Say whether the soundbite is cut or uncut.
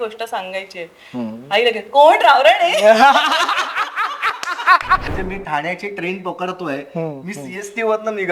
cut